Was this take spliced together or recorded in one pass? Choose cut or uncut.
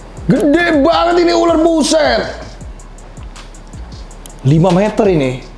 uncut